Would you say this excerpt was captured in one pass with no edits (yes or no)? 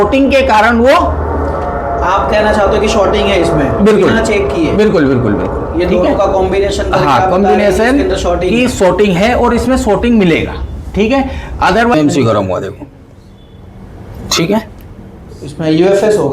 no